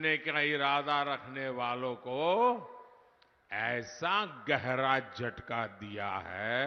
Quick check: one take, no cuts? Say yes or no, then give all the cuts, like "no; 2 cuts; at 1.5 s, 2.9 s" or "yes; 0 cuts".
yes; 0 cuts